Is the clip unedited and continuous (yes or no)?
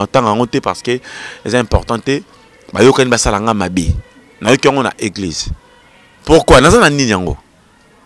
yes